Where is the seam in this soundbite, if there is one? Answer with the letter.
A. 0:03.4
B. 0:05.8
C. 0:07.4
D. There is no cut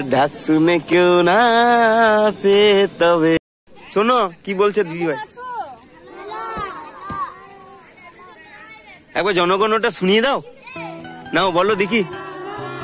A